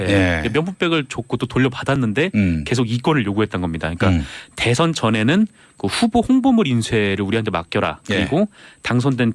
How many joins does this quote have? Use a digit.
1